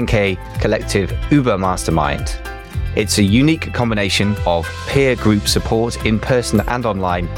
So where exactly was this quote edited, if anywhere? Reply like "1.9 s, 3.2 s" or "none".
none